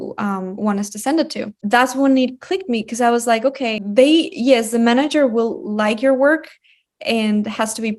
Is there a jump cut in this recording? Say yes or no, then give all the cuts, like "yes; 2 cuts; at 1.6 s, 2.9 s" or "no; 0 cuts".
yes; 2 cuts; at 1.6 s, 3.8 s